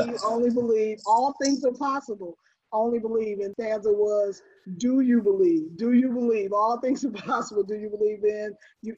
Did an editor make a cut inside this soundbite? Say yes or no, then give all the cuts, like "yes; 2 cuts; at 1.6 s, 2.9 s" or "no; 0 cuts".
yes; 1 cut; at 3.5 s